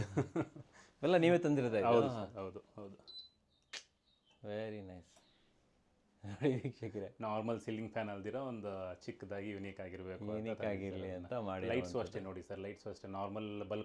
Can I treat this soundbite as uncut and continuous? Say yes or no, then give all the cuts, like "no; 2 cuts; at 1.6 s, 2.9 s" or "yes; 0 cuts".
yes; 0 cuts